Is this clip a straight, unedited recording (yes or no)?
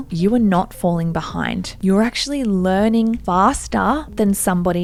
yes